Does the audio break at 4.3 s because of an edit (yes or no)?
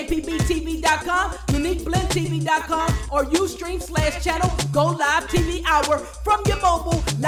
no